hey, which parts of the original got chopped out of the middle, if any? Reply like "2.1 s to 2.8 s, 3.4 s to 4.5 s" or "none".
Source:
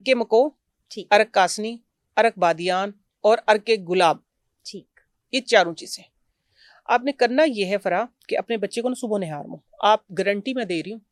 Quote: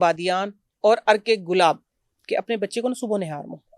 4.6 s to 8.2 s